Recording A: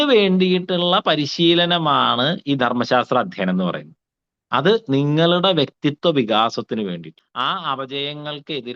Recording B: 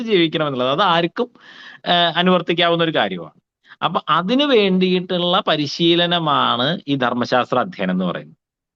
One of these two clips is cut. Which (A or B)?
A